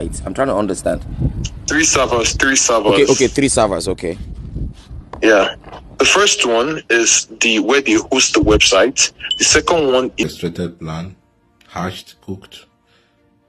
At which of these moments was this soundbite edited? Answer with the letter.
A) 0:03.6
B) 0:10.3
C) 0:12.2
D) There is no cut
B